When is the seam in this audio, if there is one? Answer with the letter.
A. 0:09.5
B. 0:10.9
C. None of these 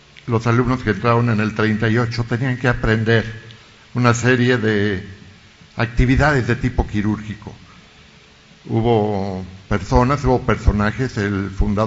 B